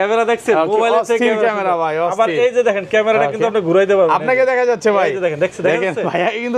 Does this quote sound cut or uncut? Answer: uncut